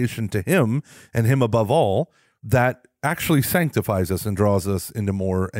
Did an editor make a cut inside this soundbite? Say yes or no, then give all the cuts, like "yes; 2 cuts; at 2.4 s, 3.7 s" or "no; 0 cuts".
no; 0 cuts